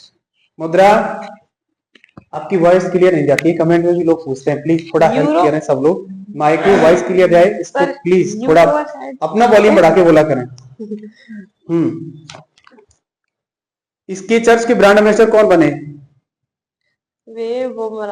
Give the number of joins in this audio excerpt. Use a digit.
0